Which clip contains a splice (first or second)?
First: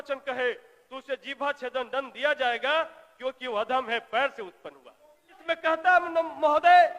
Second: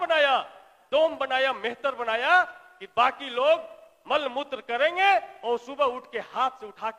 first